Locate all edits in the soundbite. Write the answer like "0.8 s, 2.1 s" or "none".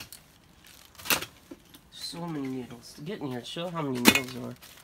none